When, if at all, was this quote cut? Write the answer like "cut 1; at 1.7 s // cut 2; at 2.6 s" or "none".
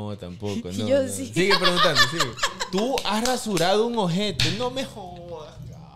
none